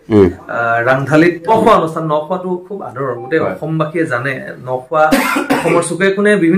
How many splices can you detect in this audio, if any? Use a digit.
1